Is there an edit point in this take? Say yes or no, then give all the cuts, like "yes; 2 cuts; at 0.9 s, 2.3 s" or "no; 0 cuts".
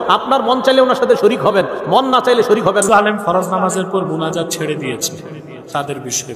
yes; 1 cut; at 2.8 s